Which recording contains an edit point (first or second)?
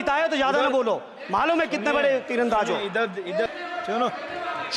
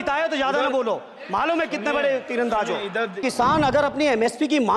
second